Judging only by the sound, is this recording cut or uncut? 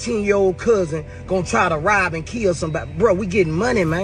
uncut